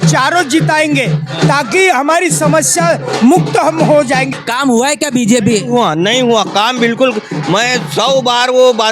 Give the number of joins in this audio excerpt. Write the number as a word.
one